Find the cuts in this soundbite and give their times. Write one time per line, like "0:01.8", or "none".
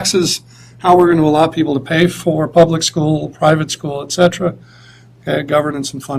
none